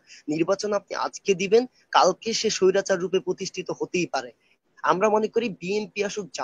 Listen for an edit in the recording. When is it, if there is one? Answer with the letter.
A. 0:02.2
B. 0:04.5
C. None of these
B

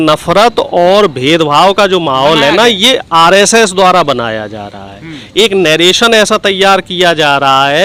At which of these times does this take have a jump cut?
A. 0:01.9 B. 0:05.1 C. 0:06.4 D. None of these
D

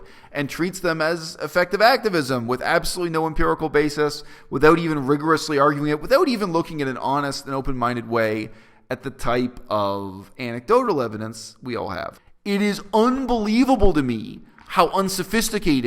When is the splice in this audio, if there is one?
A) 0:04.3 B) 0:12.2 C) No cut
B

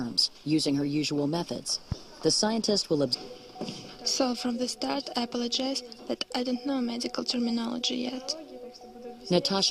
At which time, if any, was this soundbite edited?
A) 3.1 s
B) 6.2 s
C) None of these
C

